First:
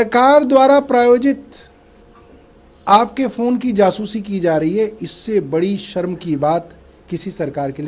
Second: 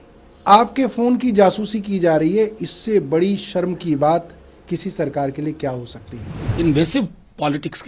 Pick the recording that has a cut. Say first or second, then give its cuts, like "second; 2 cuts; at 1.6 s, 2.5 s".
second; 1 cut; at 6.5 s